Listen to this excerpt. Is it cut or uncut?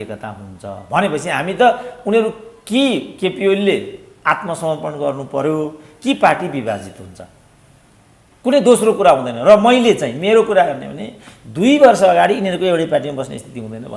uncut